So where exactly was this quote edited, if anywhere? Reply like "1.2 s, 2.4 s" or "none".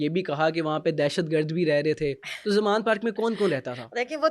none